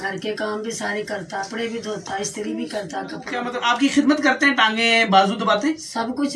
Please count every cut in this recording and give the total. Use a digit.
2